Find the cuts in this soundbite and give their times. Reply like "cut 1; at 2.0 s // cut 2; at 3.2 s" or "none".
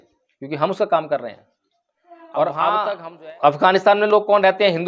cut 1; at 3.0 s